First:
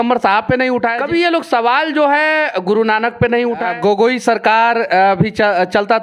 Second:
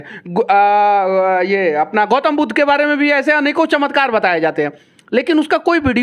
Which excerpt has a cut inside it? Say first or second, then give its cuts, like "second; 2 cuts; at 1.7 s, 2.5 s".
first; 2 cuts; at 1.0 s, 3.7 s